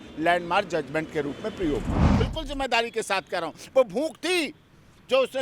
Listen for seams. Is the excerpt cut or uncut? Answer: cut